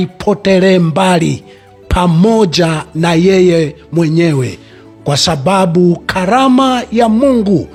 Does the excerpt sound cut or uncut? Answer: uncut